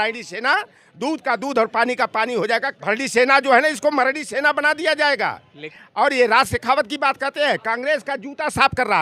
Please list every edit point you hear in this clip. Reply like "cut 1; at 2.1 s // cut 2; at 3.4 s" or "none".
cut 1; at 2.7 s // cut 2; at 5.7 s